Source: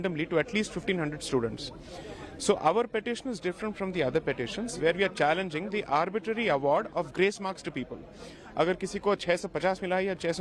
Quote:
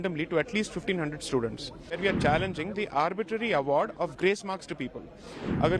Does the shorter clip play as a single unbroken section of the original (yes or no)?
no